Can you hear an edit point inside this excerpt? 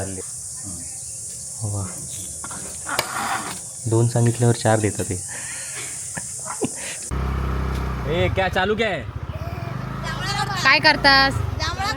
yes; 1 cut; at 7.1 s

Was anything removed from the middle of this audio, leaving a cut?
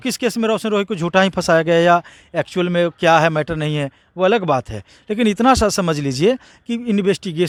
no; 0 cuts

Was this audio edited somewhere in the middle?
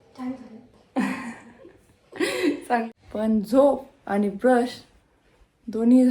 yes; 1 cut; at 2.9 s

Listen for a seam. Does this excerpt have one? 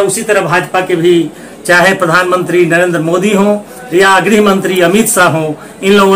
no; 0 cuts

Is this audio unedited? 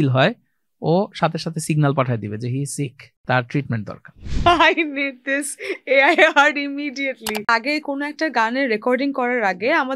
no; 3 cuts; at 3.1 s, 4.2 s, 7.5 s

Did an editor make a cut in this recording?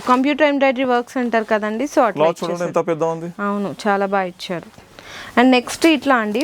no; 0 cuts

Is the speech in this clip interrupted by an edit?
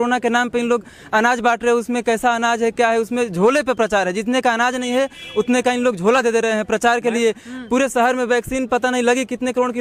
no; 0 cuts

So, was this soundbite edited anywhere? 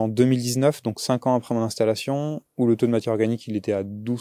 no; 0 cuts

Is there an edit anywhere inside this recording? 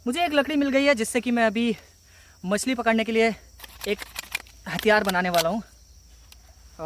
no; 0 cuts

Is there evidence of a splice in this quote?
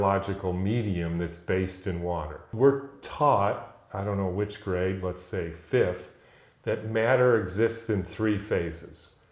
yes; 1 cut; at 2.5 s

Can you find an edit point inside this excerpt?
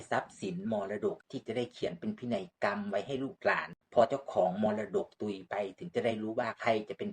yes; 2 cuts; at 1.2 s, 3.7 s

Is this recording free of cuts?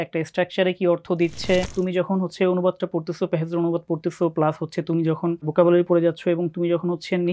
no; 2 cuts; at 1.7 s, 5.5 s

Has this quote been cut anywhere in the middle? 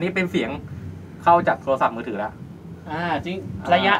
no; 0 cuts

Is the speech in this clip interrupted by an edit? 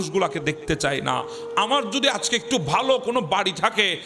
no; 0 cuts

